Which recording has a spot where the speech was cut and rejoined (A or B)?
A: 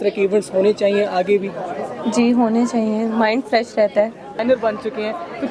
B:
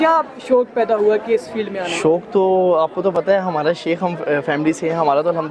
A